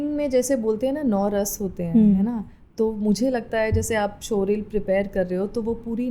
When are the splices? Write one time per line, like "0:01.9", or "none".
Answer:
none